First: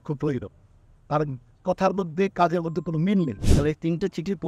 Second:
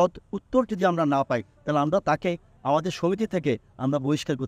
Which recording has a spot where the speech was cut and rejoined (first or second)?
first